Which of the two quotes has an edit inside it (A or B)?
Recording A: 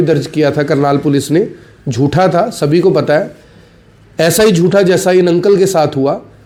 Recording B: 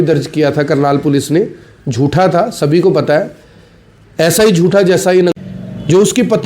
B